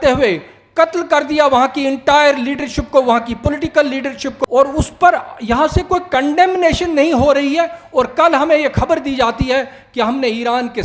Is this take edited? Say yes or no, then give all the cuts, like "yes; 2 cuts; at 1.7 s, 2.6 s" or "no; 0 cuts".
yes; 1 cut; at 4.4 s